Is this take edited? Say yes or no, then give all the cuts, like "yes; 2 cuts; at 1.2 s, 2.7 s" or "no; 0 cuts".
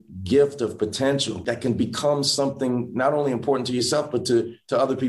no; 0 cuts